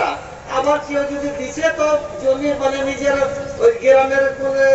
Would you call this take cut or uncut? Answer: uncut